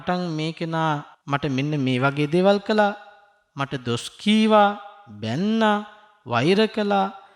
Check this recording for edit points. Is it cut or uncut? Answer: cut